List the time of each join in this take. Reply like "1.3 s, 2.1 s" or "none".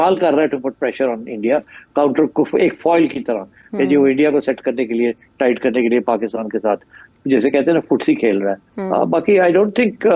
none